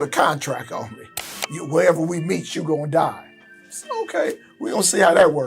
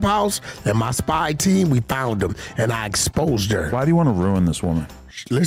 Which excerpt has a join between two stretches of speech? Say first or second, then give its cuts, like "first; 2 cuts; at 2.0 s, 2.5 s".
first; 1 cut; at 1.2 s